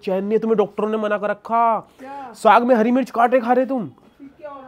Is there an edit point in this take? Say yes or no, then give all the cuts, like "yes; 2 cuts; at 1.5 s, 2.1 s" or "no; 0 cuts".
no; 0 cuts